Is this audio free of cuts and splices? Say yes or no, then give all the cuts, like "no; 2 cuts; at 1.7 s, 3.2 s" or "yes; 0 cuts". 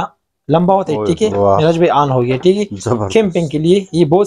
no; 1 cut; at 1.3 s